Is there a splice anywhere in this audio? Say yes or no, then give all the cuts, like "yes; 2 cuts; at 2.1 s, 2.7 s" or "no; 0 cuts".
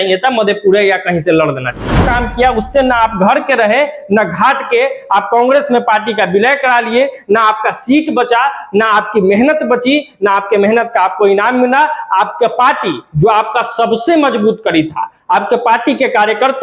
yes; 1 cut; at 2.1 s